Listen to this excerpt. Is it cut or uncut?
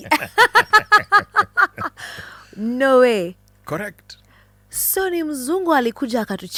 uncut